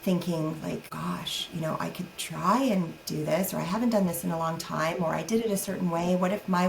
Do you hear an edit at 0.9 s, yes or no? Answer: yes